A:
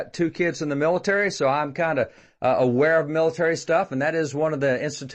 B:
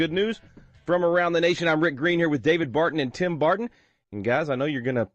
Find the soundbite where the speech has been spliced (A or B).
B